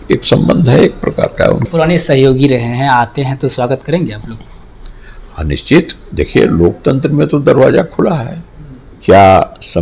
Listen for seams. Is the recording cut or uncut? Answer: cut